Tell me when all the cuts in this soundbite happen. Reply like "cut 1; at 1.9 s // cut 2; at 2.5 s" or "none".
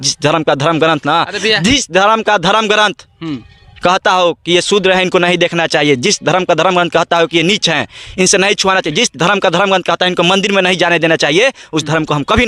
none

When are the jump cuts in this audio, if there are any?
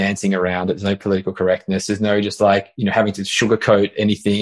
none

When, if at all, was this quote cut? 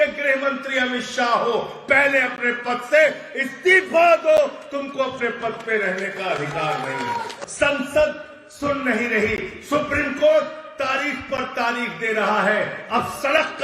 cut 1; at 7.4 s

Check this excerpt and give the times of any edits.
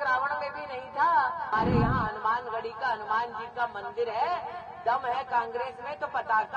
cut 1; at 1.5 s

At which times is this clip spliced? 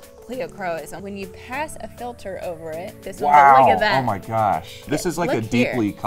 cut 1; at 0.9 s // cut 2; at 4.8 s

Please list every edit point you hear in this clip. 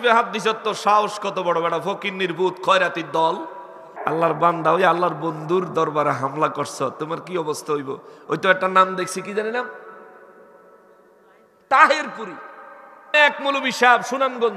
cut 1; at 3.9 s

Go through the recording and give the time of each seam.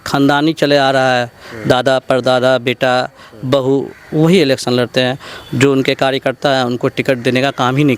none

